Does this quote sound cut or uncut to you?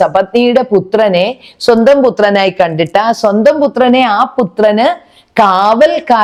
uncut